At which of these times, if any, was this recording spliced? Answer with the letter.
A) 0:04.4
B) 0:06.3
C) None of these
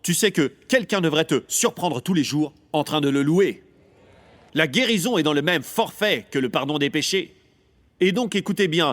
A